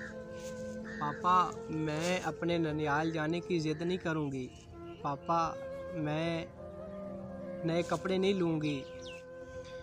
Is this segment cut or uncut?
cut